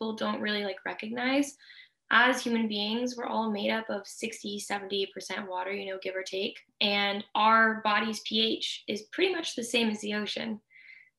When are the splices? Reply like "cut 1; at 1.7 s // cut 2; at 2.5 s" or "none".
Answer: cut 1; at 6.7 s

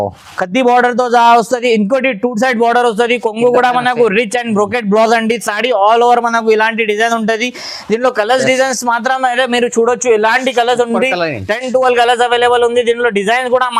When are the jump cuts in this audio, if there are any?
none

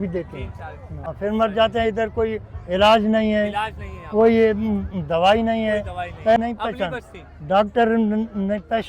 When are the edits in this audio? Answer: cut 1; at 1.1 s // cut 2; at 6.4 s

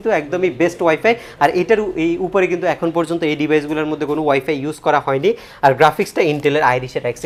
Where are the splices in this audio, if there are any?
none

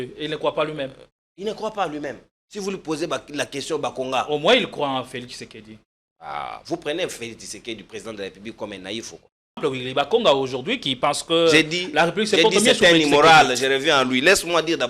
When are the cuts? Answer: cut 1; at 9.6 s

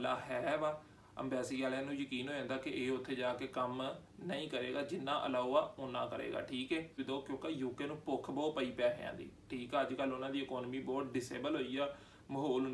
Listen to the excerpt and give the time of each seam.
cut 1; at 7.0 s

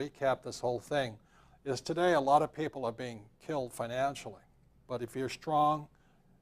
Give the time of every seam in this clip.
cut 1; at 2.1 s

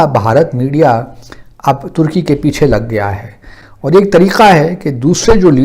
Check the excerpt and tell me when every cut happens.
cut 1; at 3.5 s

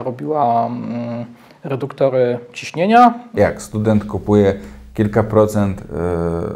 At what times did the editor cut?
cut 1; at 3.3 s

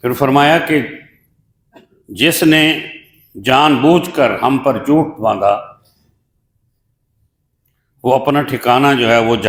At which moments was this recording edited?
none

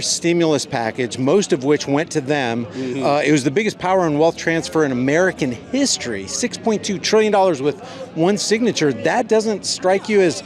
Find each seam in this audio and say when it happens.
none

